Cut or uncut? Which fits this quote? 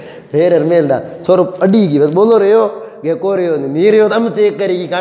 uncut